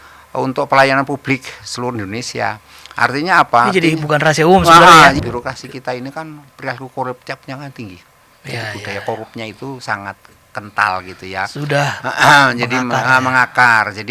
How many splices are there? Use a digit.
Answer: 1